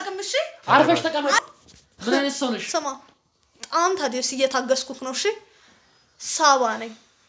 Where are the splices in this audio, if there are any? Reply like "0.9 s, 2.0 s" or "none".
1.4 s